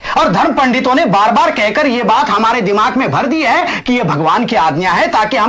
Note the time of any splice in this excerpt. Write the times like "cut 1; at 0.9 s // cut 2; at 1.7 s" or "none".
none

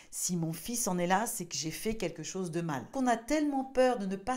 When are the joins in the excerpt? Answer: cut 1; at 2.9 s

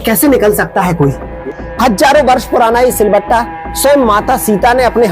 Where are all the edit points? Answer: cut 1; at 1.3 s

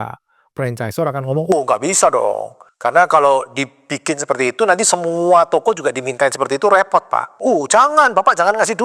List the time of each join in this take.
cut 1; at 7.4 s

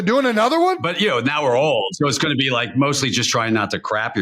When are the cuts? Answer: cut 1; at 0.9 s // cut 2; at 1.9 s

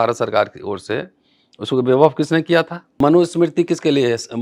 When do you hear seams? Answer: cut 1; at 3.0 s

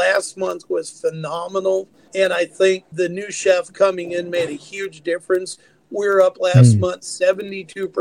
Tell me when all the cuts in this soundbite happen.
cut 1; at 2.0 s // cut 2; at 2.9 s

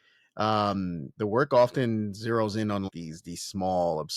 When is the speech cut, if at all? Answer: cut 1; at 2.9 s

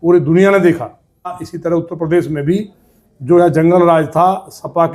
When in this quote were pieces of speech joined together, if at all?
cut 1; at 1.5 s

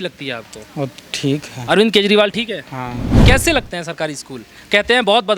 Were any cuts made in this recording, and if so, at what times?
cut 1; at 3.2 s

